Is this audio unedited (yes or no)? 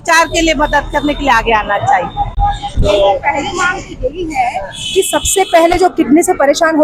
yes